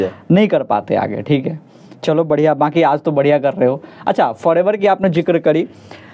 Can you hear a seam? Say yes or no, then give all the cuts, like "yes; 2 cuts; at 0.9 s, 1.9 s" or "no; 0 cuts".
no; 0 cuts